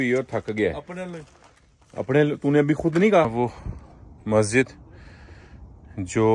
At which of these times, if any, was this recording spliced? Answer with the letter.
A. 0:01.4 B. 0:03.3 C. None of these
B